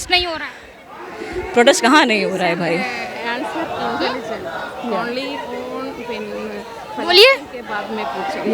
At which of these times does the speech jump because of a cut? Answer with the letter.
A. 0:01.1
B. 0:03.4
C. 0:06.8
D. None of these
D